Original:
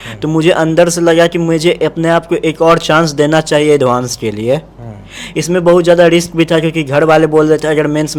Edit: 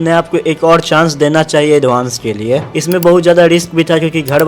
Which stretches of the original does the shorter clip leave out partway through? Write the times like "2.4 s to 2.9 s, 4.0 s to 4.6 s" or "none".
4.7 s to 5.3 s